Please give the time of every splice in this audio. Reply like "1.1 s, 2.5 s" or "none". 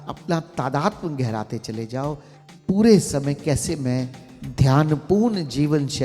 2.3 s